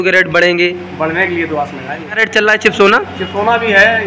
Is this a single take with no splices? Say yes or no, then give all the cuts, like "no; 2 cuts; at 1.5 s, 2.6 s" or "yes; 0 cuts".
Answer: no; 1 cut; at 2.2 s